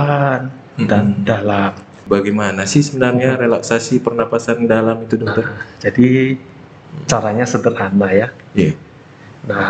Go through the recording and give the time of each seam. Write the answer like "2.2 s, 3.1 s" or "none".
2.0 s